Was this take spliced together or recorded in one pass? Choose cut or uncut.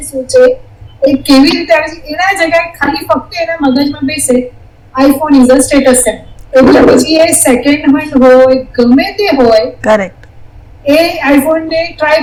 uncut